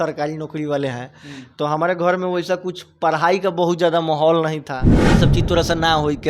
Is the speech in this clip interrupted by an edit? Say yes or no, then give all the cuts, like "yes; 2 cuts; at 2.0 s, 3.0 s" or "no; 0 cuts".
yes; 1 cut; at 5.0 s